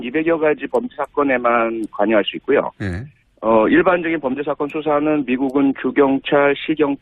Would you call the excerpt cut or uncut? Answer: cut